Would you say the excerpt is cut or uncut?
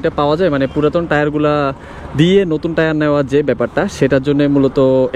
uncut